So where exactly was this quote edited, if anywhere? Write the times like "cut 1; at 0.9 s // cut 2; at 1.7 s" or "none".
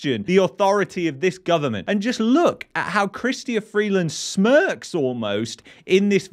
cut 1; at 1.8 s